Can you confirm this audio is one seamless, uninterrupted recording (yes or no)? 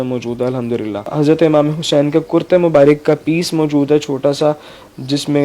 no